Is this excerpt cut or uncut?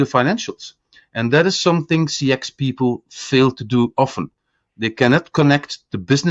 uncut